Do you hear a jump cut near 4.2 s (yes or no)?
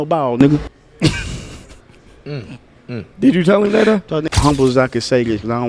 yes